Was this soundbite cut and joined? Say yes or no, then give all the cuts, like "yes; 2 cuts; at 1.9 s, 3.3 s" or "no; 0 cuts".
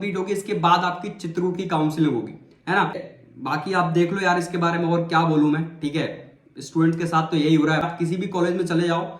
yes; 2 cuts; at 3.1 s, 7.9 s